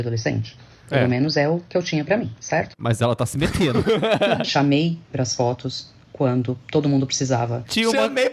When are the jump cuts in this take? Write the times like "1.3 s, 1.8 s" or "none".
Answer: 4.4 s